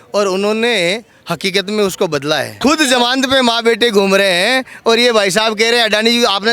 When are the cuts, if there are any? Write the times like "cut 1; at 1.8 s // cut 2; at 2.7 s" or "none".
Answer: cut 1; at 2.5 s